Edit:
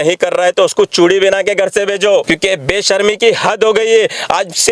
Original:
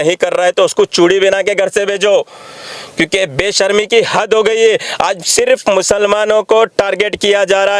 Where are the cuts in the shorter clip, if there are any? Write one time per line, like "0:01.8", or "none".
0:02.2